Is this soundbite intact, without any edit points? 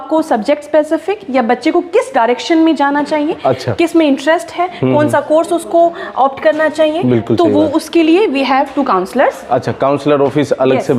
yes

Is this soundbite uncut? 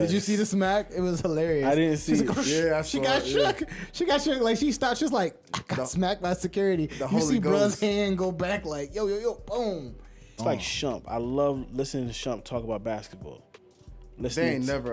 no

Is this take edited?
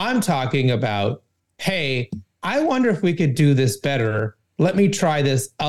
no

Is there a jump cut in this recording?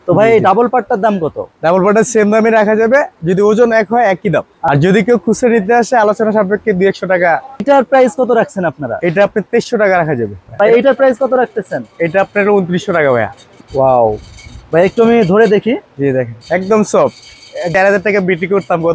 yes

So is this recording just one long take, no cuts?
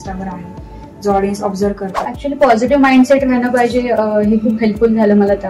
no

